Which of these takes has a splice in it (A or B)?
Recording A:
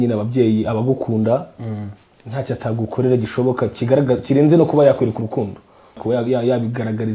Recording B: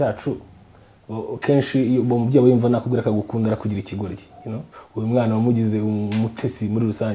B